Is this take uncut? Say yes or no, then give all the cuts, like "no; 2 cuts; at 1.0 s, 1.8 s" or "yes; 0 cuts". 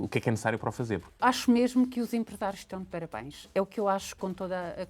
no; 1 cut; at 1.1 s